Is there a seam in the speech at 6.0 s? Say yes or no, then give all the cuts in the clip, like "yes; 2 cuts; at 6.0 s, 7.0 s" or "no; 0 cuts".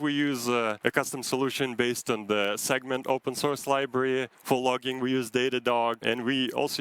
yes; 3 cuts; at 0.8 s, 4.3 s, 6.0 s